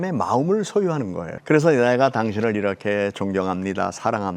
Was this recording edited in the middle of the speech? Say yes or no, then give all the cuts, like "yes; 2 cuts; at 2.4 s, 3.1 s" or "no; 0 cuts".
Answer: yes; 1 cut; at 1.3 s